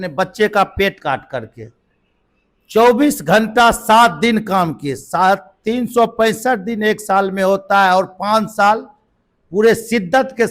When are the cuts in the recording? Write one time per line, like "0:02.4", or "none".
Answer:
0:01.0